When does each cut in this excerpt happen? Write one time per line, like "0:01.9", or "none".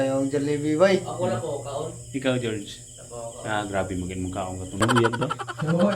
0:04.8